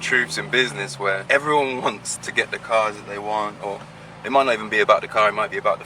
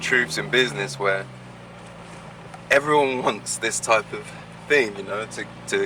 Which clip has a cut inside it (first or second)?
first